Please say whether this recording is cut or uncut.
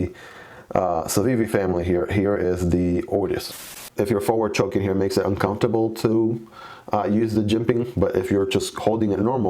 cut